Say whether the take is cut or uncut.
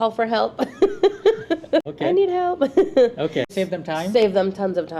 cut